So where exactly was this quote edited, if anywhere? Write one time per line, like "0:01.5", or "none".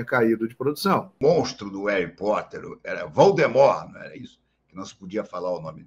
0:01.2